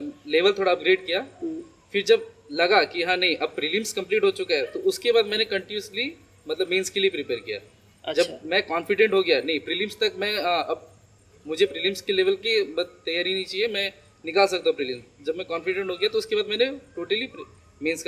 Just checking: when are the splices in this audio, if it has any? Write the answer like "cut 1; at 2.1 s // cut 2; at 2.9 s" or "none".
none